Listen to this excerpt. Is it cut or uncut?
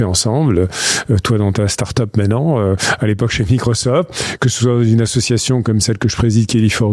uncut